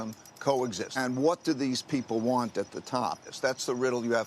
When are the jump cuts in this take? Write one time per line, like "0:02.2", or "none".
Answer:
0:01.0
0:03.3